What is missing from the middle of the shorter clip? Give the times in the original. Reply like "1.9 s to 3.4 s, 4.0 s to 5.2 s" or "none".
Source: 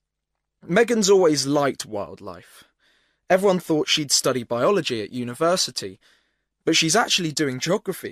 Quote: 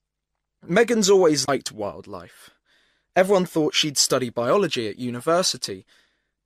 1.5 s to 1.6 s